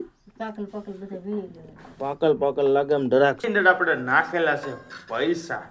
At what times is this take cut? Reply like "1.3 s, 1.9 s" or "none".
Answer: 3.4 s